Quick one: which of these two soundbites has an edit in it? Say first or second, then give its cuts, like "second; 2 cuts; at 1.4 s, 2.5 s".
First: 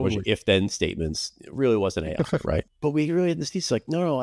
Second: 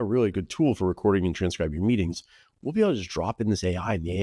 first; 1 cut; at 2.6 s